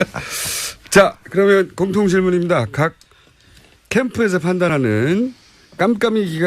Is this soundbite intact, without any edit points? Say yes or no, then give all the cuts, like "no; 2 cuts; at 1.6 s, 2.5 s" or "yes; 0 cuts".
no; 1 cut; at 1.4 s